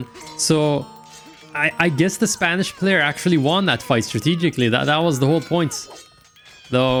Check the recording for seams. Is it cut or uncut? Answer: uncut